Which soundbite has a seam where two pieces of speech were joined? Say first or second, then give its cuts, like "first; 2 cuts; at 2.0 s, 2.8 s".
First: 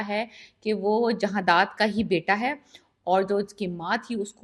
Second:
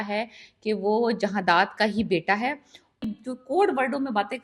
second; 1 cut; at 3.0 s